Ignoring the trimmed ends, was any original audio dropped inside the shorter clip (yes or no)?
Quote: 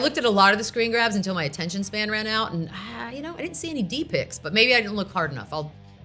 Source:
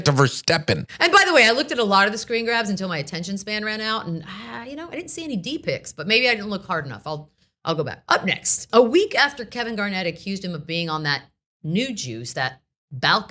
no